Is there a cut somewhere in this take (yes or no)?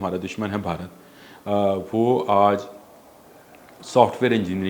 no